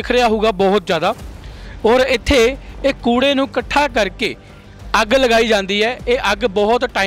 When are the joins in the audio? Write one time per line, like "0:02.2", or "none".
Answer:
none